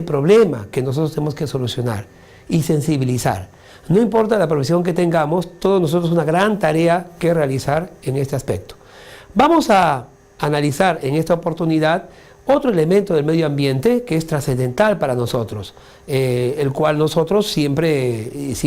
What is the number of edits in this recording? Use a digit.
1